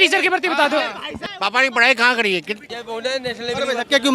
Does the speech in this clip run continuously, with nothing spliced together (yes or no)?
no